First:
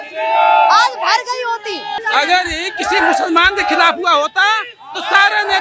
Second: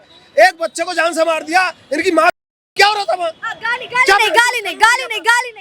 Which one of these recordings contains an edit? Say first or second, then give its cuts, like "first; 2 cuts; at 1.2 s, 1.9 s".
first; 1 cut; at 1.9 s